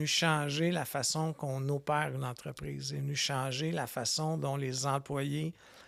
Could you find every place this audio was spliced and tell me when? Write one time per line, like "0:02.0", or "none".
none

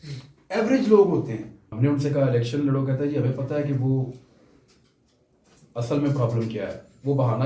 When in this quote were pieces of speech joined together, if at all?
0:01.6

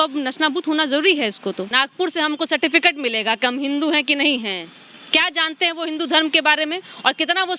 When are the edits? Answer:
0:01.7

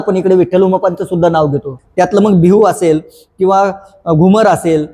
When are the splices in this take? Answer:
0:01.8

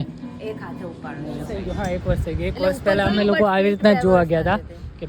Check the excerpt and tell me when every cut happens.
0:01.5

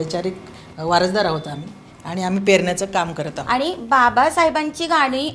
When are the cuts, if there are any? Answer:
0:03.3

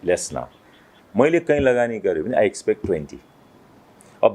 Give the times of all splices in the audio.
0:01.0

